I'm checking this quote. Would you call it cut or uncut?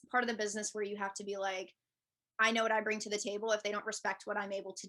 uncut